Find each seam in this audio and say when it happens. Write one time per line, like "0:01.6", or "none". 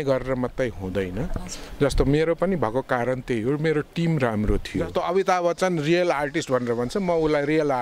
0:04.9